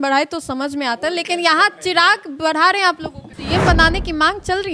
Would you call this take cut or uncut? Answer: cut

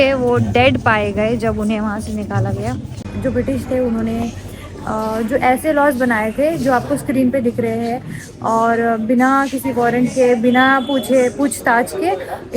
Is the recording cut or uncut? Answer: cut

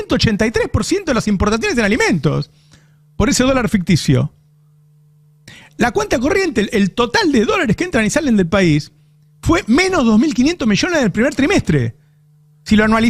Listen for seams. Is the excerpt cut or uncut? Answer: uncut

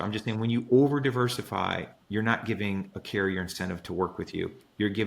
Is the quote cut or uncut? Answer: cut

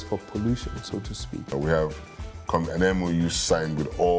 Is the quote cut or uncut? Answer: cut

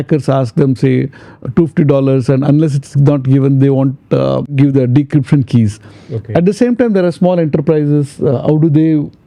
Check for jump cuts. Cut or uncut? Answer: uncut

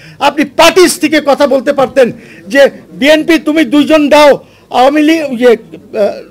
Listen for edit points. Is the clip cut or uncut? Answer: uncut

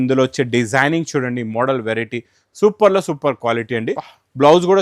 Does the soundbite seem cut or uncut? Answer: uncut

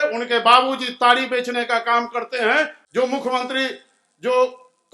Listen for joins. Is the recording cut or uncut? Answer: cut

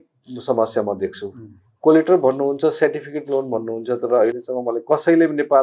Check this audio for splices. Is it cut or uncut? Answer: uncut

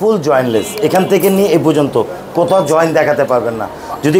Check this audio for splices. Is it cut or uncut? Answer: uncut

